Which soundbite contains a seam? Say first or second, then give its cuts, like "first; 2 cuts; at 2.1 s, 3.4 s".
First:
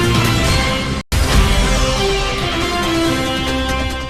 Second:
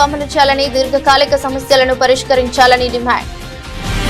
first; 1 cut; at 1.1 s